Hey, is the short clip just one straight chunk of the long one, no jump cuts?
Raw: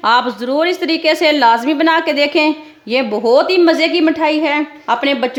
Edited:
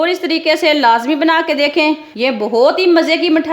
no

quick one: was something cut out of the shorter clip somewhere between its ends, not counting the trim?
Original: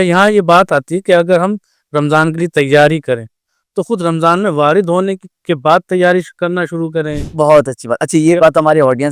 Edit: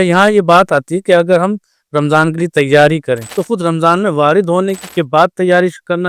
yes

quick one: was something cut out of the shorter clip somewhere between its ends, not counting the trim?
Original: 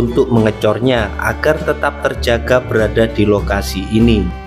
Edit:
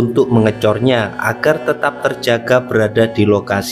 no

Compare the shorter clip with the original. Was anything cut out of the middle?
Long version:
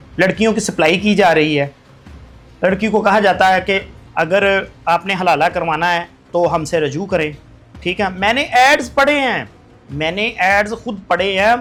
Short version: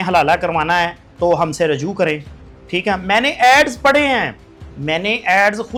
no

